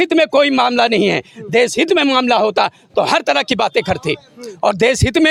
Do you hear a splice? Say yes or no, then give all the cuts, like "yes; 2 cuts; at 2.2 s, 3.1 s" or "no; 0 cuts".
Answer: no; 0 cuts